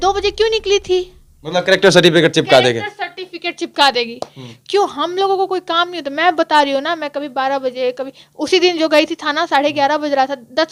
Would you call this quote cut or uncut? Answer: uncut